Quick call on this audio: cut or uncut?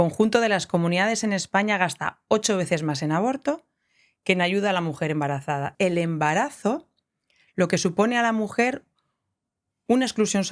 cut